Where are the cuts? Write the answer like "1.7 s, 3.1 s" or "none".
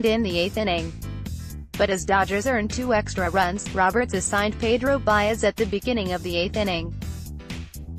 6.9 s